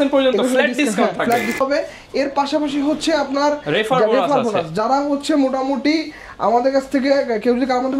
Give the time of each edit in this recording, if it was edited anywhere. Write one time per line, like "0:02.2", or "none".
0:01.6